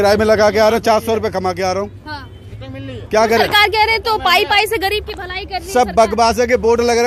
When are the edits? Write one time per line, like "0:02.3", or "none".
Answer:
none